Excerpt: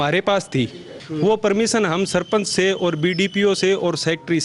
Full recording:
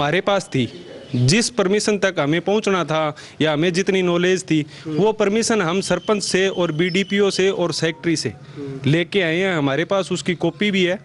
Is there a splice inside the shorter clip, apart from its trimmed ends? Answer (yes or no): yes